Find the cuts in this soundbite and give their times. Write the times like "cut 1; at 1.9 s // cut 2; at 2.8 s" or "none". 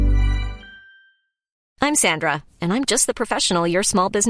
cut 1; at 1.5 s